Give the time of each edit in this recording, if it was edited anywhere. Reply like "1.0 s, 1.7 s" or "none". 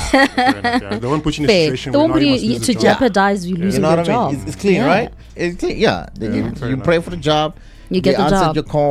none